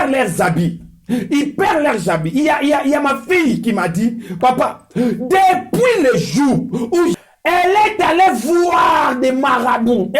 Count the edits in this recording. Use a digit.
1